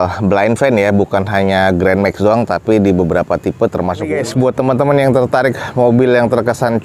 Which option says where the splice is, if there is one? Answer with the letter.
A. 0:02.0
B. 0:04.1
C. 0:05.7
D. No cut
B